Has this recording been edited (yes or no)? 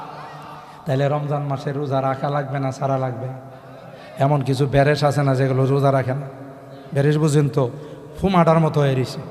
no